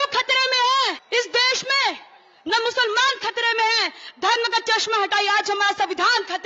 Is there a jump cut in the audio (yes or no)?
yes